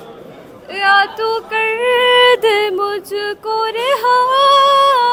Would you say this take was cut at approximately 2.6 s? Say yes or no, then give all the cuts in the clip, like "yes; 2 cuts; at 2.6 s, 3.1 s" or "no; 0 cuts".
no; 0 cuts